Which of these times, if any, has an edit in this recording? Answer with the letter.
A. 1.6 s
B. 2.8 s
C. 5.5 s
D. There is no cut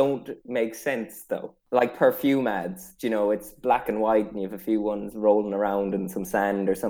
A